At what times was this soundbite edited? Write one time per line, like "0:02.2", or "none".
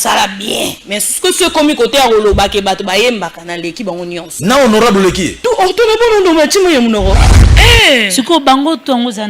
0:07.4